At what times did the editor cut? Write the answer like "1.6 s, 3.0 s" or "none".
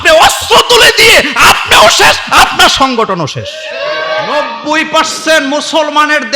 4.3 s

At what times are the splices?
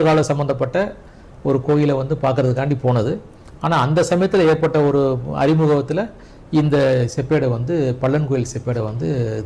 none

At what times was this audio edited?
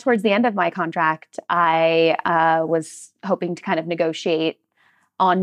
none

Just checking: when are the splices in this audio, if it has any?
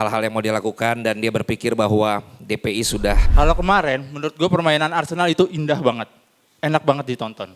3.3 s

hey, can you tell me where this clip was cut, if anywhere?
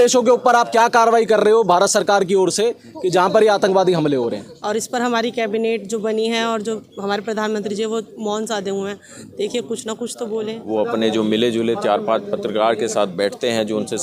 4.5 s, 10.6 s

